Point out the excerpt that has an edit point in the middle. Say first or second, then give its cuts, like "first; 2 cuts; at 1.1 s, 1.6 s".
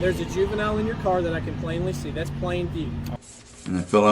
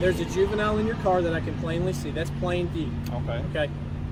first; 1 cut; at 3.2 s